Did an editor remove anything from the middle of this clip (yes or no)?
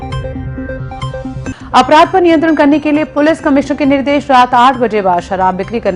yes